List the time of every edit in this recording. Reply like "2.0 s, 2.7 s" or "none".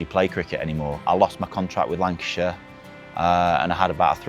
1.0 s